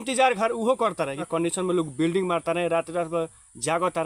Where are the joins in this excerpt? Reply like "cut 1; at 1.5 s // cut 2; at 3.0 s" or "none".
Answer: cut 1; at 1.2 s